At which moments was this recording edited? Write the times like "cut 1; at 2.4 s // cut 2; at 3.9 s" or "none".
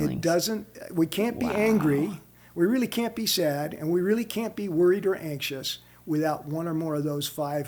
none

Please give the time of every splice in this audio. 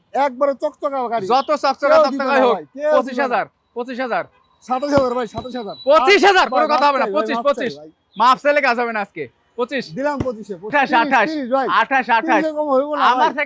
cut 1; at 10.7 s

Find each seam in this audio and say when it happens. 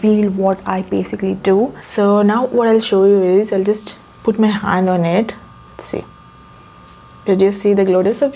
cut 1; at 1.8 s

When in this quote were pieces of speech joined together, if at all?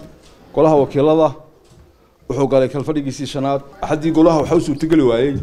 cut 1; at 3.7 s

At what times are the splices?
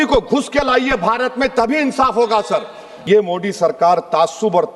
cut 1; at 3.0 s

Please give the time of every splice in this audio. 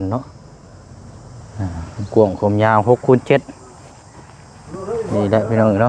none

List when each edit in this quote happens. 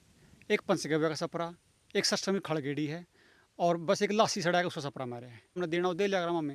cut 1; at 5.6 s

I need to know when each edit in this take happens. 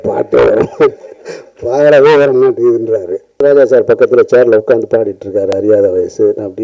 cut 1; at 3.4 s

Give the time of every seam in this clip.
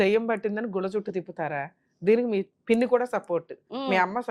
cut 1; at 2.5 s

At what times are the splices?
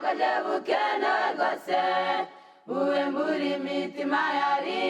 cut 1; at 2.1 s

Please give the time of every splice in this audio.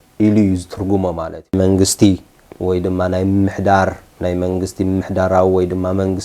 cut 1; at 1.5 s

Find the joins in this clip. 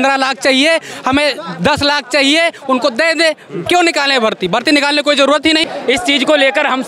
cut 1; at 5.6 s

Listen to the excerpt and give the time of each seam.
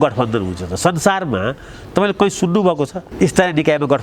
cut 1; at 3.0 s

